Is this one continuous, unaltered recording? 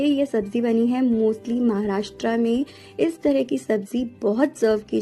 yes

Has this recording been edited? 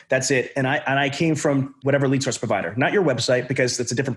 yes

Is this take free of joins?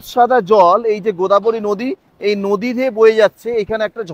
yes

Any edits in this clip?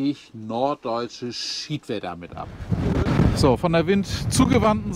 yes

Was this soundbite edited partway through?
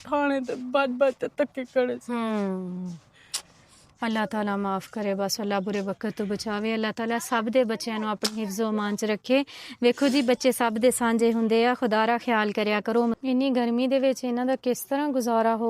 yes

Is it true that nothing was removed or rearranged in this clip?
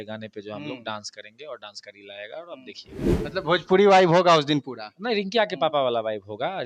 yes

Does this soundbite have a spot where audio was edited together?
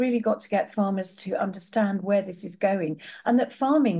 no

